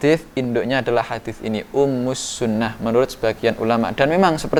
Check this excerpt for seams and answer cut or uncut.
uncut